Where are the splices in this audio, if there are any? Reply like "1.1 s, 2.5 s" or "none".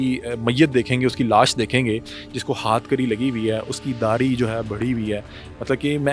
none